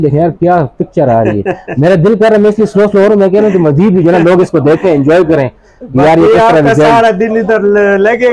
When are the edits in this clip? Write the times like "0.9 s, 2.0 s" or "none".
none